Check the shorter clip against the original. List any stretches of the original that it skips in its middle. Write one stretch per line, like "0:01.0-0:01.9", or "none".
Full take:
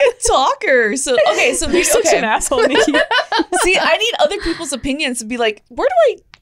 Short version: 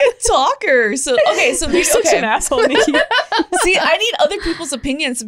none

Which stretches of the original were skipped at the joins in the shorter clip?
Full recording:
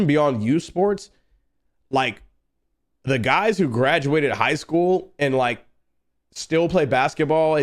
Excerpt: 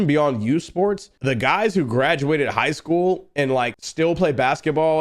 0:01.1-0:02.9
0:05.6-0:06.3

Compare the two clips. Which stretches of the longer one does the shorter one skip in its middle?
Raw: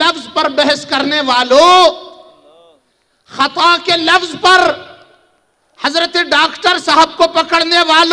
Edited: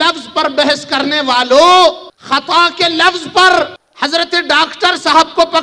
0:02.1-0:03.2
0:04.9-0:05.7

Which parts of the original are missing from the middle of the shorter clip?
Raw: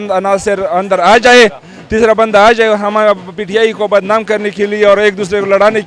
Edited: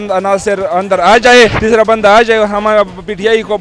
0:01.6-0:01.9

